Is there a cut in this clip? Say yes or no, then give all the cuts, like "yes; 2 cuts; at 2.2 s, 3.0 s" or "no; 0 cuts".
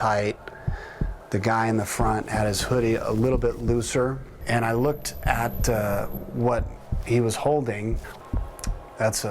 yes; 2 cuts; at 4.3 s, 8.1 s